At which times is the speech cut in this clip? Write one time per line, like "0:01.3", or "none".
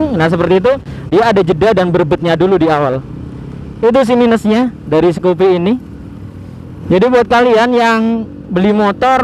0:06.8